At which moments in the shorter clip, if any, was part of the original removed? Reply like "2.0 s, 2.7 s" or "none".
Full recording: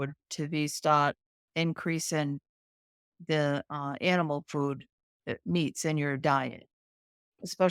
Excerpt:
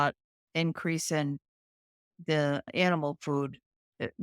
2.7 s